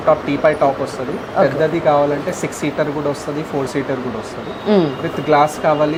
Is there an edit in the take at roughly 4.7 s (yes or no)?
no